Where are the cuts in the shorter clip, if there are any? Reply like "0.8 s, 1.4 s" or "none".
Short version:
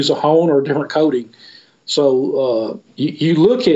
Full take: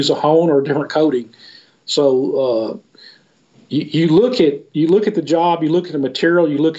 2.8 s